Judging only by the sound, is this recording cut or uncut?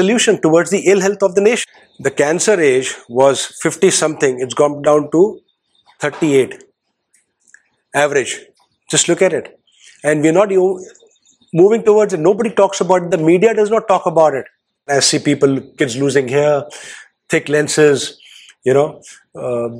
cut